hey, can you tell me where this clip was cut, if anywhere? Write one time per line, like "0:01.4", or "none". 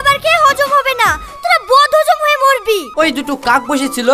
0:02.9